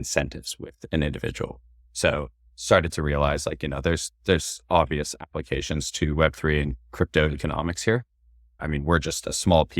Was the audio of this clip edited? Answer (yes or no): yes